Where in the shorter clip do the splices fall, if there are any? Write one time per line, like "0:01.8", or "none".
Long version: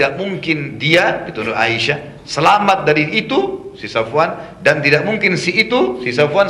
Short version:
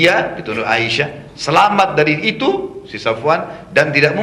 none